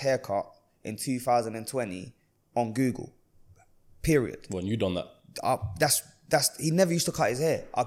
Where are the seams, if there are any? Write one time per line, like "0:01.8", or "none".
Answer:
none